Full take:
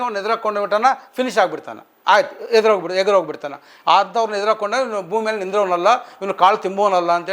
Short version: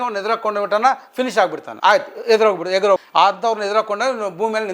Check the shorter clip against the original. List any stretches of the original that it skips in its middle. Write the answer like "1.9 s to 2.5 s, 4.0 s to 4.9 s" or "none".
1.7 s to 1.9 s, 3.3 s to 3.8 s